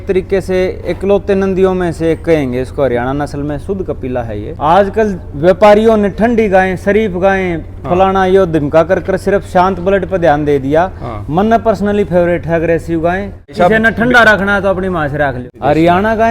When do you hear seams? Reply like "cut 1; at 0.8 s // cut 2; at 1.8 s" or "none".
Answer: cut 1; at 4.5 s // cut 2; at 13.5 s // cut 3; at 15.4 s